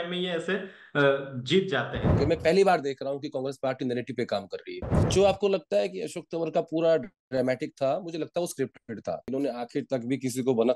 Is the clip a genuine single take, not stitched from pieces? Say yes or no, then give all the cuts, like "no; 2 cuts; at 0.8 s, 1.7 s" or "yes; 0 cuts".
no; 3 cuts; at 2.0 s, 5.0 s, 9.3 s